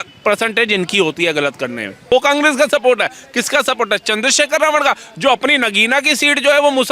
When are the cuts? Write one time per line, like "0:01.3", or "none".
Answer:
0:02.1